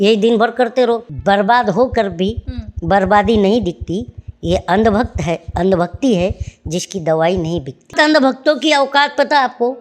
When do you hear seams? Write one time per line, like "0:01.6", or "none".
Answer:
0:01.0
0:07.9